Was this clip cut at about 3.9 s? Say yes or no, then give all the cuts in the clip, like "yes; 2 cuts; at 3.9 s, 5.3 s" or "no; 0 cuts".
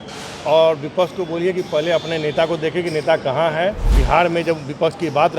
yes; 1 cut; at 3.9 s